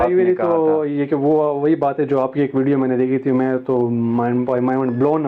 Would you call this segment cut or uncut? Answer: uncut